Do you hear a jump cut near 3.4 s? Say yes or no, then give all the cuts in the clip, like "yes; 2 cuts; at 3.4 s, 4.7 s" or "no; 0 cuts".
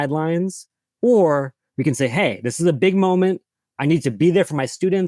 no; 0 cuts